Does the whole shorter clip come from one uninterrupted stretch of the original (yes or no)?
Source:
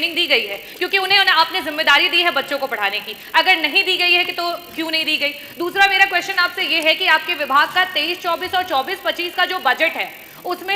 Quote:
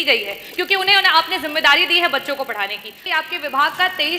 no